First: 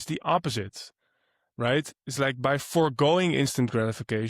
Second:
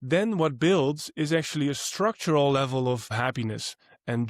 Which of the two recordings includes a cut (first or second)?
second